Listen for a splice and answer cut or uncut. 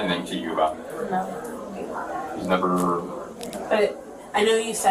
cut